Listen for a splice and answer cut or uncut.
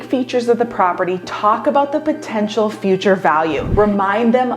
cut